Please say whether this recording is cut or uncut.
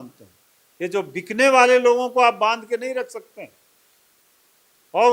uncut